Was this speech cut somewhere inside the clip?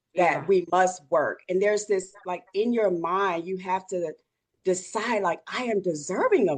no; 0 cuts

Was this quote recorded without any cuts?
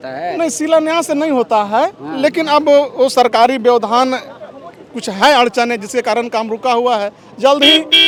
yes; 0 cuts

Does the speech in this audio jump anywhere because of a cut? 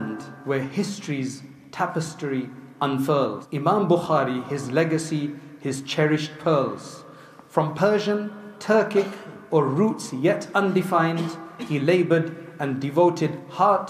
yes; 1 cut; at 3.4 s

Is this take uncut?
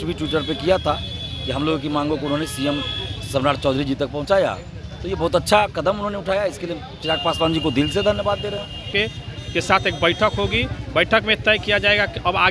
no; 1 cut; at 8.9 s

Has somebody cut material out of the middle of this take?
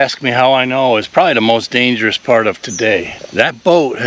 yes; 1 cut; at 3.2 s

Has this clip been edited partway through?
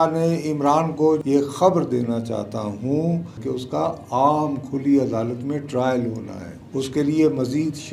yes; 2 cuts; at 1.2 s, 3.3 s

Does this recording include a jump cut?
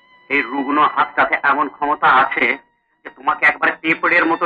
no; 0 cuts

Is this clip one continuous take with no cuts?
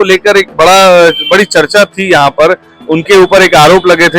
no; 1 cut; at 2.7 s

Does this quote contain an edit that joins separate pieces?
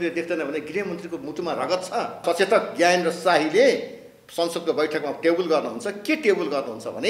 yes; 1 cut; at 2.2 s

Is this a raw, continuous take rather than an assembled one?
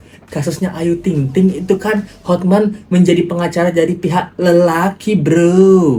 yes; 0 cuts

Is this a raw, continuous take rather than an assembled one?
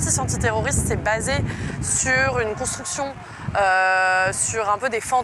yes; 0 cuts

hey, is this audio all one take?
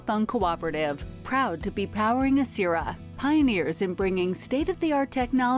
yes; 0 cuts

